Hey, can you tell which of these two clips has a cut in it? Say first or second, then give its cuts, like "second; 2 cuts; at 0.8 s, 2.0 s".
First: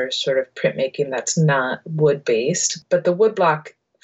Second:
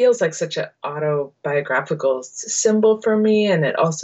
first; 1 cut; at 2.8 s